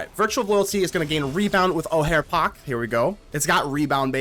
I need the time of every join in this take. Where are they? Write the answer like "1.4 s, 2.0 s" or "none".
3.3 s